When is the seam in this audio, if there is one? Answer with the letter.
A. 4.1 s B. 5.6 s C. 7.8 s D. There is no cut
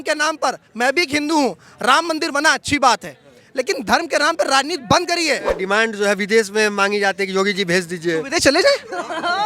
B